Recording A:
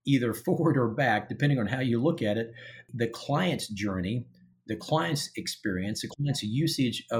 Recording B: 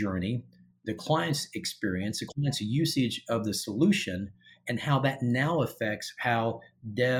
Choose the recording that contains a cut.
A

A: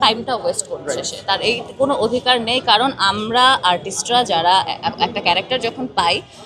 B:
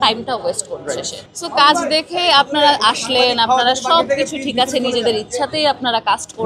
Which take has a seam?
B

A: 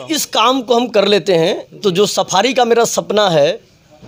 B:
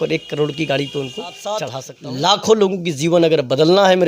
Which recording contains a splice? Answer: B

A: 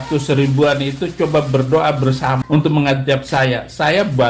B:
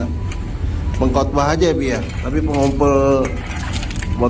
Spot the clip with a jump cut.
A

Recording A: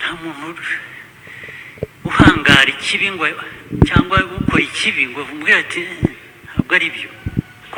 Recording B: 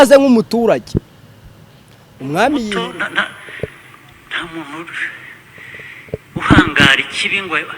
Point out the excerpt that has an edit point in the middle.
B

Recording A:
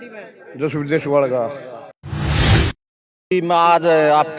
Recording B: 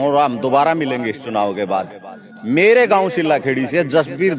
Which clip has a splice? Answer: A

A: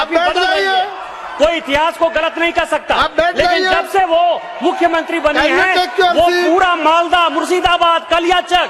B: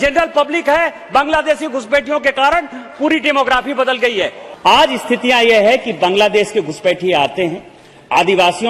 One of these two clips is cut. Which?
B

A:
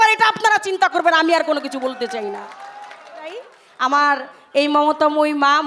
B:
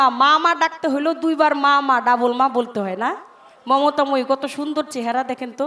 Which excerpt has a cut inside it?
A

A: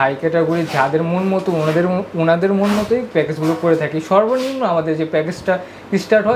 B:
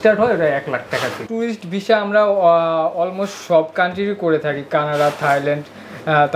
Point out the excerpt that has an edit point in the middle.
B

